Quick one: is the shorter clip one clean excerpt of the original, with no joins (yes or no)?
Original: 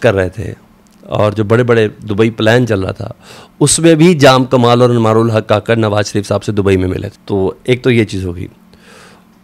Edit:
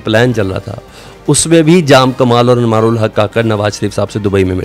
yes